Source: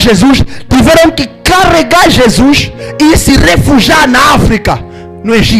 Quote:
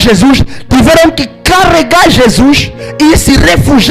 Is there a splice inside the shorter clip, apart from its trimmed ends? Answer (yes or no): no